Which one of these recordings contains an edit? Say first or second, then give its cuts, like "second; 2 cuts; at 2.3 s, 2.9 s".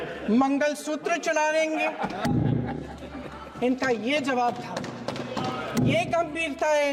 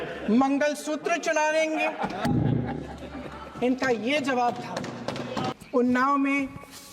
second; 1 cut; at 5.6 s